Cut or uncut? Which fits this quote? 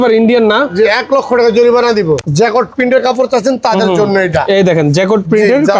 cut